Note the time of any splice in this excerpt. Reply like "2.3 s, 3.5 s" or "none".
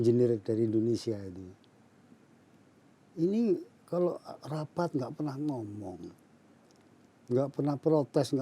none